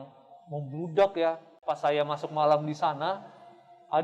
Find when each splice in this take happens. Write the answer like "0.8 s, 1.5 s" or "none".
1.5 s

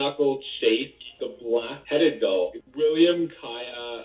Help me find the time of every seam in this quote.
0.9 s, 2.6 s

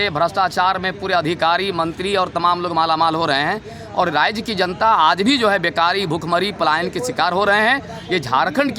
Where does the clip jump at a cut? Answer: none

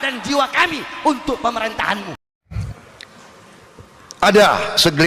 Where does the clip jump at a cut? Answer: 2.3 s

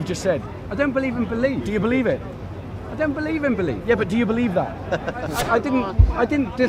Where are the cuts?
5.4 s

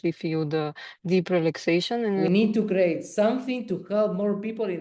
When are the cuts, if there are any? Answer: 2.2 s

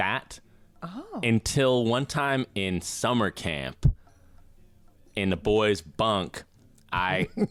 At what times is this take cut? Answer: none

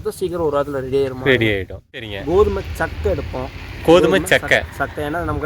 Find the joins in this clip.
2.1 s

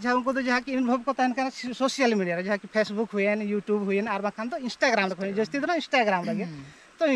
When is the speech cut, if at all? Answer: none

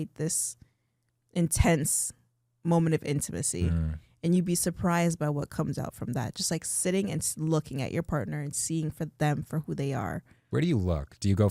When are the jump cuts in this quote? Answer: 10.3 s

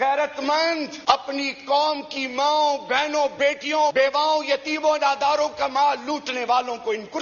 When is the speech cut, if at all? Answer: 0.9 s, 3.9 s

